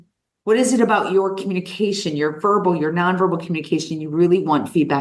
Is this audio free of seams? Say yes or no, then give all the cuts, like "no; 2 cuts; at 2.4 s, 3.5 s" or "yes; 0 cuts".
yes; 0 cuts